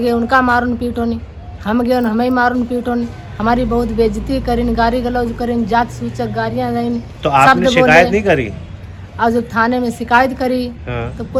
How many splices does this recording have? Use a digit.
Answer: 0